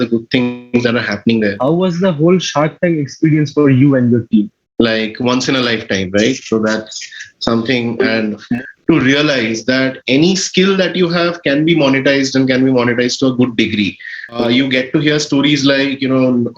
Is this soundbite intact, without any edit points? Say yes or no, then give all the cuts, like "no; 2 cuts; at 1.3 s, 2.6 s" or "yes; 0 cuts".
no; 4 cuts; at 1.6 s, 4.6 s, 8.5 s, 14.4 s